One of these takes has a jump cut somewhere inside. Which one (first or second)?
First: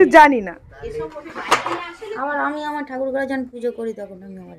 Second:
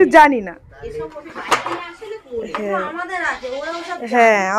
first